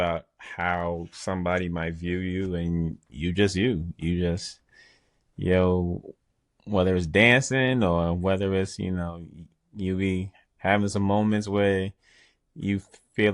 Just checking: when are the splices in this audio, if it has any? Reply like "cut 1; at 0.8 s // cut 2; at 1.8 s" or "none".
none